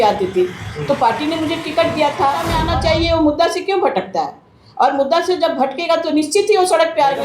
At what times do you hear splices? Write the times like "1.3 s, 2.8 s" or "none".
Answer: 2.6 s